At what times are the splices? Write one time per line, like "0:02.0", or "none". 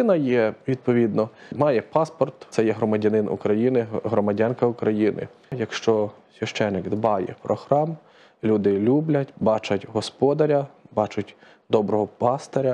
0:01.5
0:02.4
0:05.7